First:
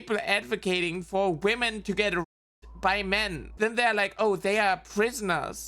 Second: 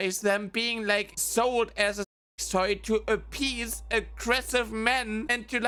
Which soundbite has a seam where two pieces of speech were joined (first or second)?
first